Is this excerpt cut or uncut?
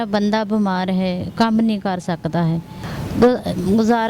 cut